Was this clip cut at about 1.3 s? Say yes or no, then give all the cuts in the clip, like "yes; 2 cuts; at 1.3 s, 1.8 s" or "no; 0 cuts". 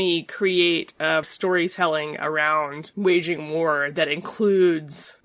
yes; 1 cut; at 1.3 s